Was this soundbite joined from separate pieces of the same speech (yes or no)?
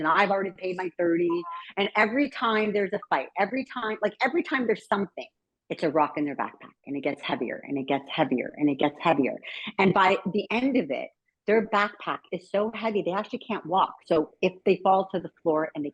no